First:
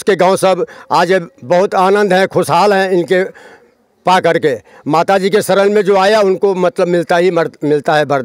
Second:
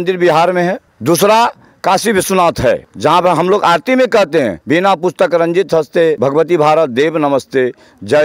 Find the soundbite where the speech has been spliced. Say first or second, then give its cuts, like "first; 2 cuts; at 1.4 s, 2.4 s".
second; 4 cuts; at 0.9 s, 2.9 s, 4.6 s, 6.2 s